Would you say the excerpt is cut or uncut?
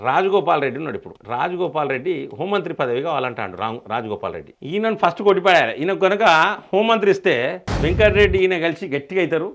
uncut